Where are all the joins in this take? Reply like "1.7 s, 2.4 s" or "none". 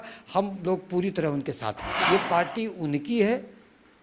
1.9 s